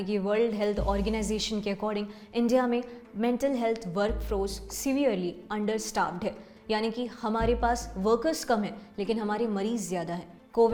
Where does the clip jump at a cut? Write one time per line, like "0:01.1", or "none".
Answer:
none